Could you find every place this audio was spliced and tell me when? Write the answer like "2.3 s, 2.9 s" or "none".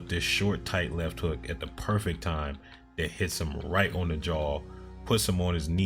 none